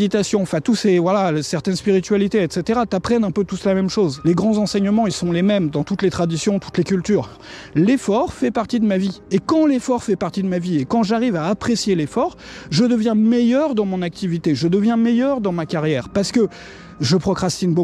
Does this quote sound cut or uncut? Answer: cut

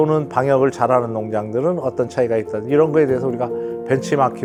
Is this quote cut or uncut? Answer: uncut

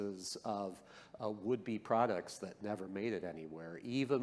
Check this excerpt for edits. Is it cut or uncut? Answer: uncut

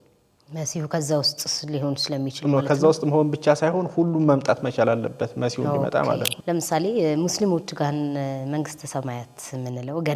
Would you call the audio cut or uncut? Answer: cut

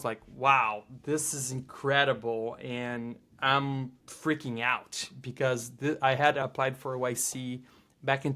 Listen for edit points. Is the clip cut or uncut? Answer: cut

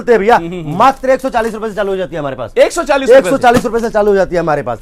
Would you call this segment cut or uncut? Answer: uncut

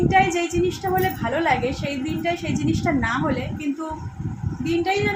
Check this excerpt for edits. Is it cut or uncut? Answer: uncut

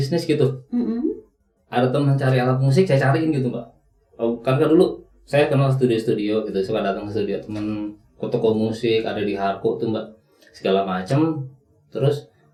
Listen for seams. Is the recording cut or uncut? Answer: uncut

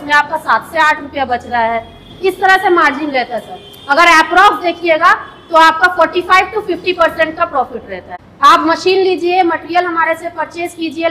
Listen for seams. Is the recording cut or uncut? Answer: cut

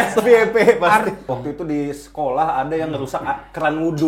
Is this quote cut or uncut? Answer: cut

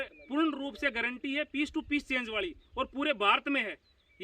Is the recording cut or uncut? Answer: uncut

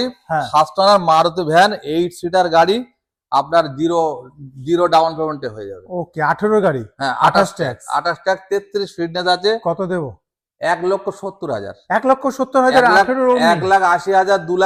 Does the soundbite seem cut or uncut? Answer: uncut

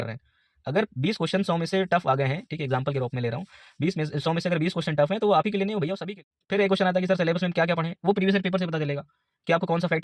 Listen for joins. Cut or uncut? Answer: cut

